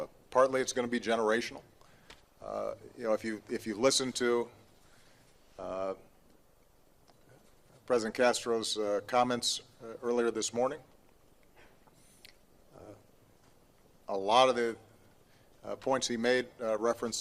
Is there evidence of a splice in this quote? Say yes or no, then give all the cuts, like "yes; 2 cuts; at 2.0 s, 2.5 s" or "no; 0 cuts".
yes; 1 cut; at 0.9 s